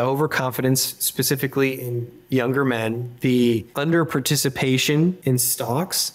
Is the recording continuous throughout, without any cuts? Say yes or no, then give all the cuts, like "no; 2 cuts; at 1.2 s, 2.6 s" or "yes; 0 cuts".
yes; 0 cuts